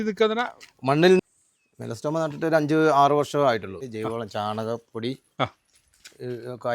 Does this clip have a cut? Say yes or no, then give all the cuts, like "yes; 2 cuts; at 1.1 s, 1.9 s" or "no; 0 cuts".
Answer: yes; 2 cuts; at 1.2 s, 3.7 s